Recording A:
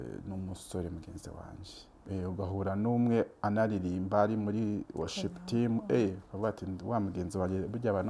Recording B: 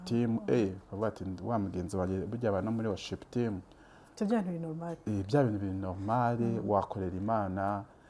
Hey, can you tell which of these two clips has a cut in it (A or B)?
A